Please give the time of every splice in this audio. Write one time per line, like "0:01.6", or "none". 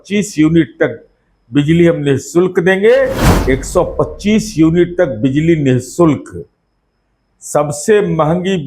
0:03.3